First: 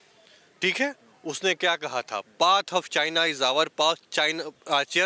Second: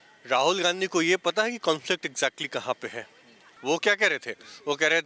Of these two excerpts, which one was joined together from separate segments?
second; 1 cut; at 3.5 s

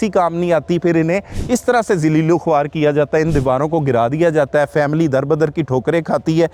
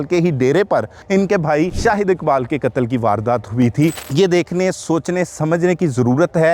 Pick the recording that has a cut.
second; 3 cuts; at 1.0 s, 1.7 s, 4.0 s

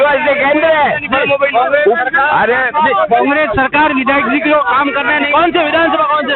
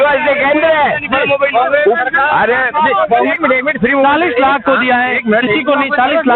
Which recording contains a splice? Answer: second; 1 cut; at 3.3 s

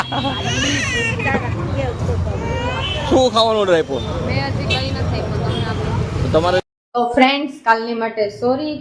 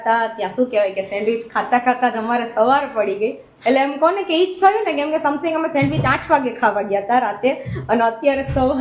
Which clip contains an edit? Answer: first; 1 cut; at 6.7 s

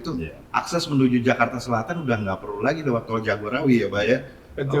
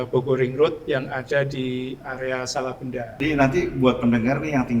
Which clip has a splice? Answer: second; 1 cut; at 3.2 s

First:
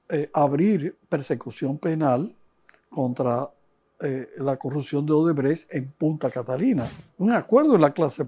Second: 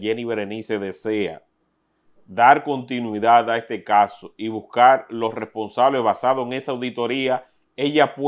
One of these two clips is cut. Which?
first; 1 cut; at 6.9 s

